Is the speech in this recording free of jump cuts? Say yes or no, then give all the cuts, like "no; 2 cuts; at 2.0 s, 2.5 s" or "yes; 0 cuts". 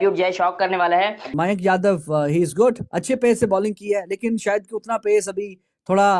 no; 1 cut; at 1.3 s